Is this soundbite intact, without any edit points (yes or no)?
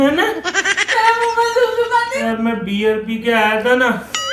no